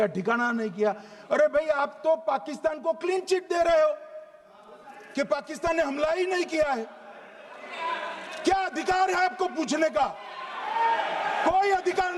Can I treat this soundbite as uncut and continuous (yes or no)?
yes